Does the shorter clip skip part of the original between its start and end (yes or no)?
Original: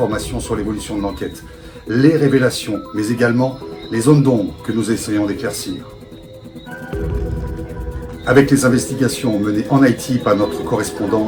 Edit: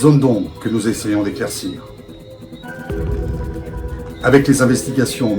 no